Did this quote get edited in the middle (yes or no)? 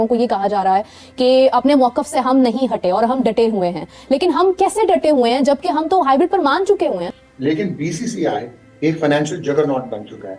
yes